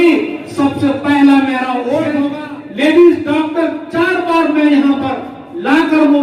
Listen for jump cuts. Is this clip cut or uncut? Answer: cut